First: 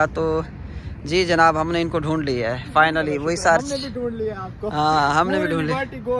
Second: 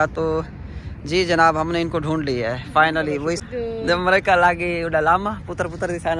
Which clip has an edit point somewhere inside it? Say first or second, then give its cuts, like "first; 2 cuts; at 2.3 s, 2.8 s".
second; 1 cut; at 3.4 s